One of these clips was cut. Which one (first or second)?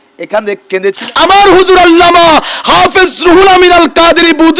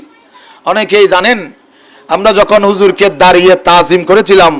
first